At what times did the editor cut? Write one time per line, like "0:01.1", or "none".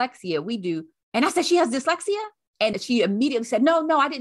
0:00.9
0:02.8